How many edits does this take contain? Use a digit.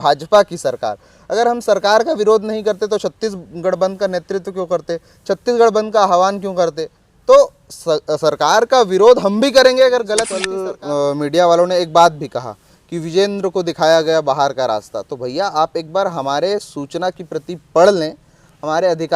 1